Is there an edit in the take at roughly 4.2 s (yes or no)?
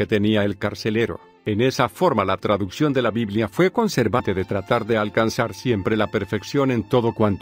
no